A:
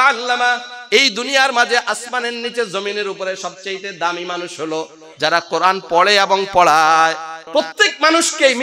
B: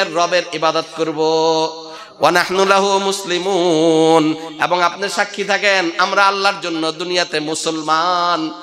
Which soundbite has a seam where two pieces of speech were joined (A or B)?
A